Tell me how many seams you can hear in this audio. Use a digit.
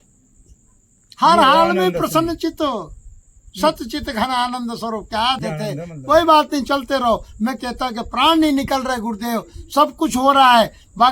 1